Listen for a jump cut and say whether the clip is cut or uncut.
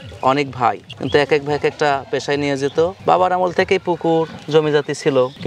uncut